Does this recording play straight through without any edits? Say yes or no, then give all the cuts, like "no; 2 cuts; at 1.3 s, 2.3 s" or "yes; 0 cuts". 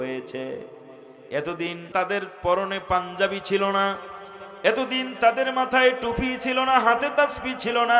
no; 1 cut; at 1.9 s